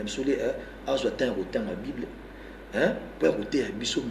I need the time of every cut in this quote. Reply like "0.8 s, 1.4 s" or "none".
none

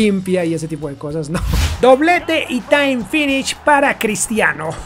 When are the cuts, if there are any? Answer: 1.6 s

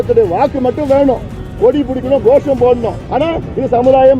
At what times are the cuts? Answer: 3.0 s

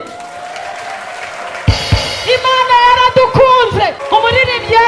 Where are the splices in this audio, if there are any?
4.0 s

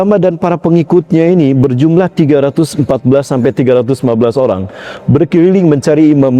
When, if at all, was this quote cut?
none

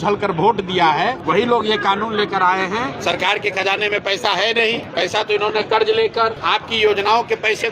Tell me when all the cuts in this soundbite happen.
1.2 s, 2.9 s, 4.8 s, 6.4 s

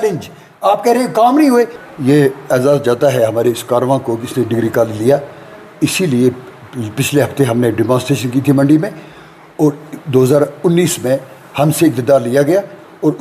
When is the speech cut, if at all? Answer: 1.8 s

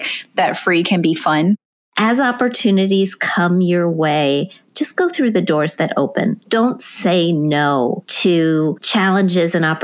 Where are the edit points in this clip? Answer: 1.7 s, 6.4 s, 8.1 s, 8.8 s

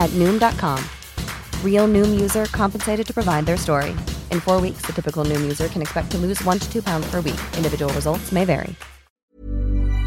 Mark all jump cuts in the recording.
9.1 s

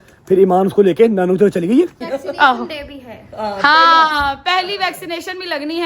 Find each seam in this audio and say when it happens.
2.1 s

